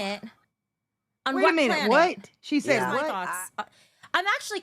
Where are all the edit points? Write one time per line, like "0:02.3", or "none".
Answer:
0:03.1